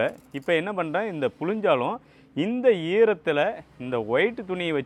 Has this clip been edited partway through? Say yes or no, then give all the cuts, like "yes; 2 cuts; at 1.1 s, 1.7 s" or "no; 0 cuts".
no; 0 cuts